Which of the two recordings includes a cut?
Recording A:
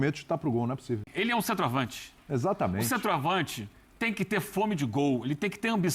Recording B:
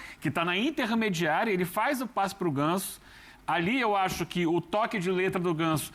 A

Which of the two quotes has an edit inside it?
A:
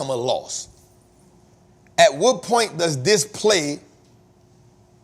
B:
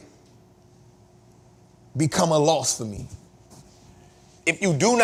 A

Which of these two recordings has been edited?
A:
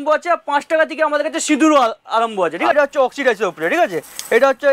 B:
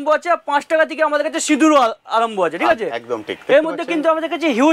A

